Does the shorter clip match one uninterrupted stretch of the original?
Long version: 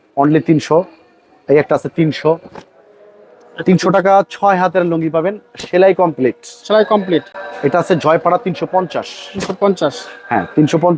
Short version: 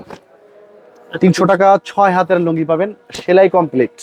yes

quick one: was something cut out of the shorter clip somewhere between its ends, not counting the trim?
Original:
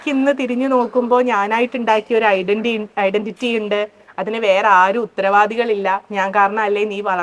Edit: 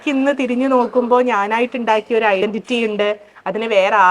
yes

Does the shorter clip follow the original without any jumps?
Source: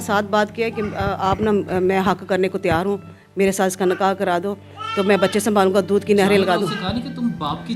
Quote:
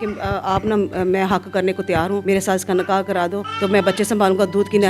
no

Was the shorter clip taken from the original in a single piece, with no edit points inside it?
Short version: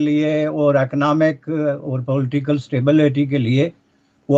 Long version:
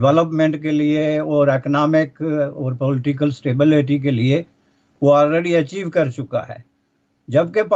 yes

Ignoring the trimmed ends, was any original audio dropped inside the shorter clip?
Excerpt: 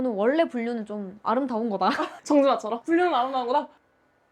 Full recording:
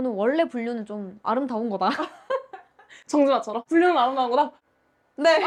yes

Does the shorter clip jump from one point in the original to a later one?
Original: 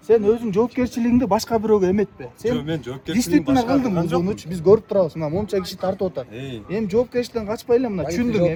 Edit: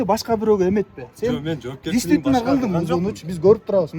no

